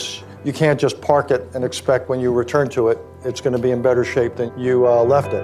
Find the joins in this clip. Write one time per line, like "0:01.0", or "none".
0:04.4